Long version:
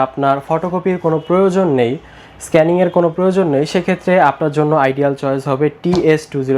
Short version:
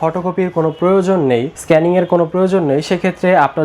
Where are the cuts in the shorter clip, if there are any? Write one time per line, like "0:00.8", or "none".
0:01.5